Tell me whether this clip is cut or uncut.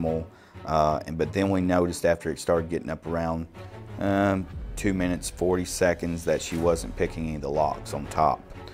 uncut